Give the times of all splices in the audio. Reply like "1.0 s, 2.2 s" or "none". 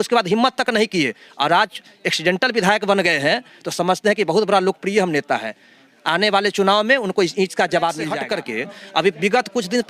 8.1 s